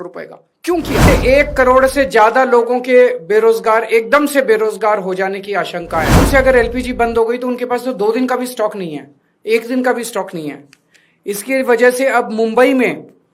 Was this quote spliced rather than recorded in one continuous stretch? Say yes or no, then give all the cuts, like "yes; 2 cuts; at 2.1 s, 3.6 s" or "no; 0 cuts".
yes; 2 cuts; at 1.1 s, 6.2 s